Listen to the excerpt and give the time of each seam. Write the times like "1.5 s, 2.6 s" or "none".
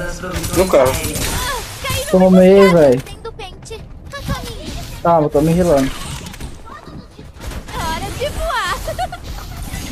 none